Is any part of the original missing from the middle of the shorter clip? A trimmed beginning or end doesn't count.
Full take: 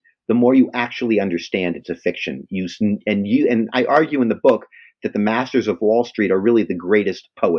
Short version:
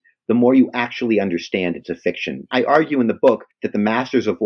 yes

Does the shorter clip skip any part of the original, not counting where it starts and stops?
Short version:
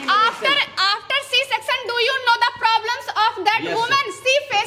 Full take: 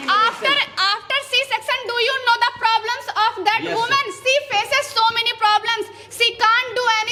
no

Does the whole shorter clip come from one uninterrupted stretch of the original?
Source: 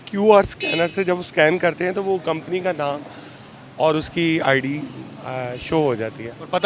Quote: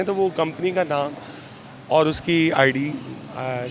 yes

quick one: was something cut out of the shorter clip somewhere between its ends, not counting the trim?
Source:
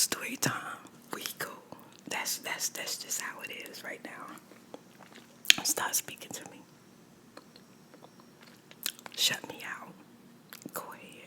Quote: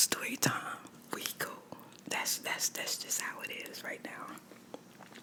no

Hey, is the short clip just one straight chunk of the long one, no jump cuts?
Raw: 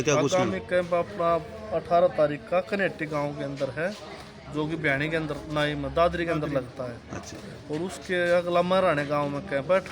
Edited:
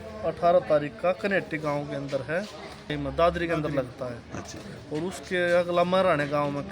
no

